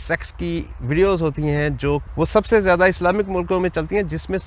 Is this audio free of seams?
no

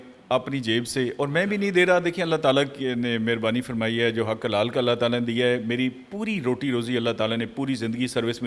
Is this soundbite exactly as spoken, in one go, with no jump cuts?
yes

